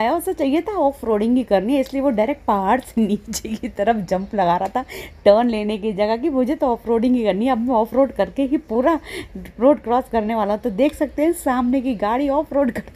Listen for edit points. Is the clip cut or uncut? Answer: uncut